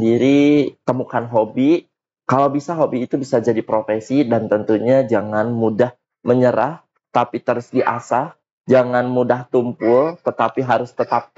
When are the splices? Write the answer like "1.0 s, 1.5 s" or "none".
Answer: none